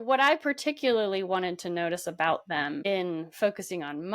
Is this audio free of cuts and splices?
no; 1 cut; at 2.9 s

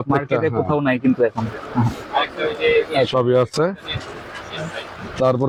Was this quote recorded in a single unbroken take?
yes; 0 cuts

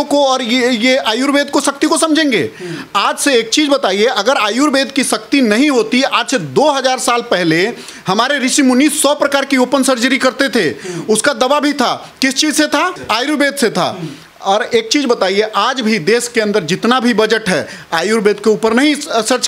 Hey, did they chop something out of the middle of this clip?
no; 0 cuts

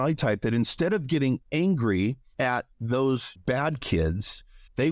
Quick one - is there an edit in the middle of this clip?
yes; 2 cuts; at 2.2 s, 3.3 s

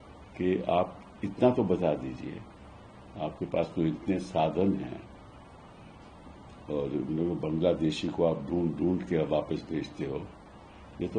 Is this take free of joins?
yes; 0 cuts

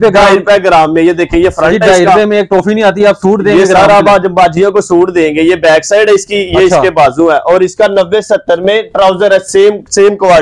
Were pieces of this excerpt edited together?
no; 0 cuts

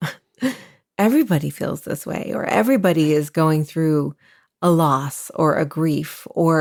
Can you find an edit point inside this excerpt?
no; 0 cuts

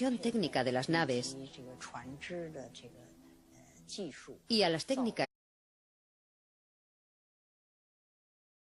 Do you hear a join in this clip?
no; 0 cuts

